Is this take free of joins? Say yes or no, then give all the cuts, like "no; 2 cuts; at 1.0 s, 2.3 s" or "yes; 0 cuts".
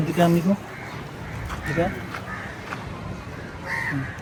yes; 0 cuts